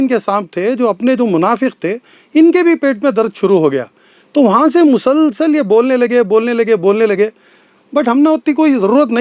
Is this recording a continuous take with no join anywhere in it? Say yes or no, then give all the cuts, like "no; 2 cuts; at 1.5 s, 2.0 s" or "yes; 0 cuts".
yes; 0 cuts